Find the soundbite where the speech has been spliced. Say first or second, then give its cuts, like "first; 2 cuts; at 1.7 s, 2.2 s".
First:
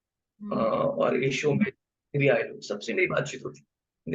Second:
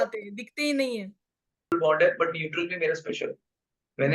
second; 1 cut; at 1.7 s